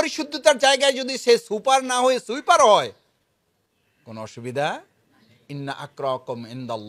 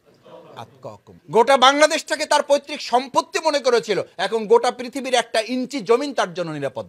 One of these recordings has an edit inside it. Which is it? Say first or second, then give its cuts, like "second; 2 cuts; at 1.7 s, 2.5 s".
second; 1 cut; at 1.1 s